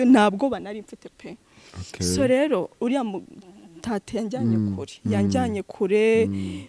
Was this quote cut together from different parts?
no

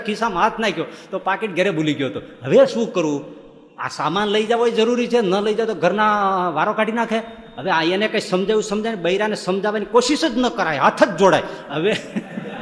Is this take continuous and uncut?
yes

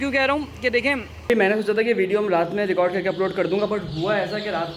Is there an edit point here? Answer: yes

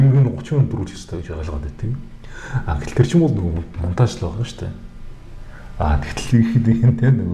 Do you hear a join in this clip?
no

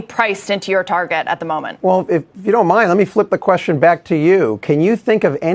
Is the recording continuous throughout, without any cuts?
no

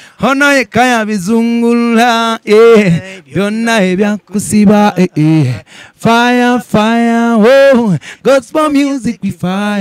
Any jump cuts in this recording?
no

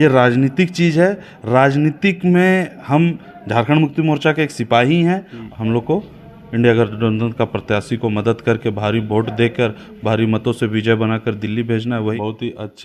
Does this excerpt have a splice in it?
yes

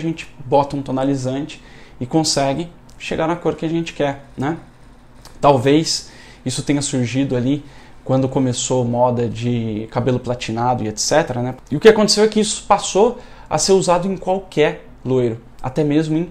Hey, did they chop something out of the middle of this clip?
yes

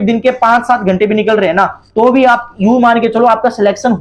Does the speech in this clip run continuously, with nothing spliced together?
yes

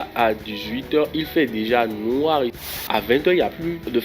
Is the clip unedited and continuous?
no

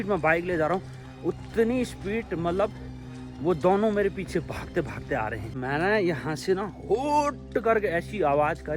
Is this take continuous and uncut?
no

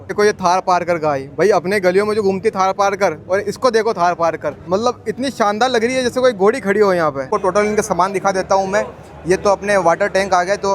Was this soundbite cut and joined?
yes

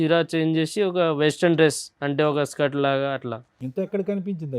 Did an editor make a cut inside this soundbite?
no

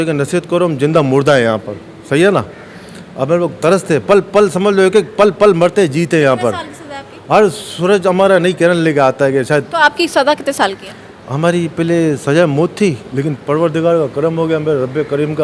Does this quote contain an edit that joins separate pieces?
no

